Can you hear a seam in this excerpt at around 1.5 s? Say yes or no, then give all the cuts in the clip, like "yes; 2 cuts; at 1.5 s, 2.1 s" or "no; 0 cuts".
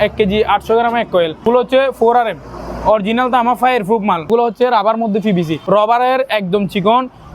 yes; 3 cuts; at 1.5 s, 4.3 s, 5.6 s